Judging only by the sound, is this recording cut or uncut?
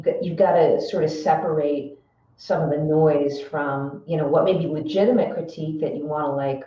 uncut